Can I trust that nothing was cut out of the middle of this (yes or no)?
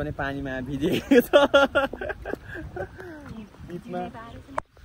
yes